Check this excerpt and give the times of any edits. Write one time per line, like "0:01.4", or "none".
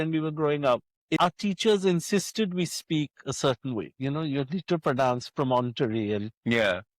0:01.1

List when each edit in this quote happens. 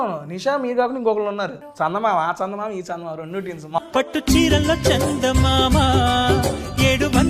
0:01.6
0:03.8

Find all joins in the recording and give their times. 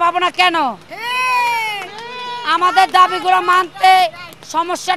none

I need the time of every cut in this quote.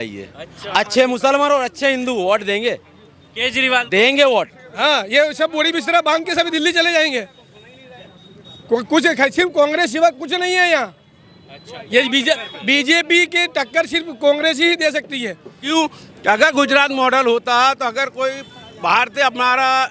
0:04.6
0:15.5

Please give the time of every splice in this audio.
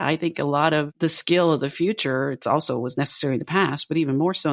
0:00.9

